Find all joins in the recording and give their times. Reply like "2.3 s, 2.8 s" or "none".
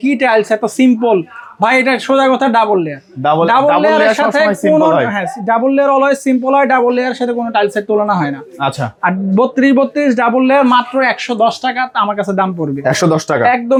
none